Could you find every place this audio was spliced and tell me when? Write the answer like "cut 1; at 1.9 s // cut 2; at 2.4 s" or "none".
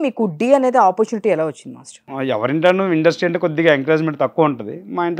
cut 1; at 2.0 s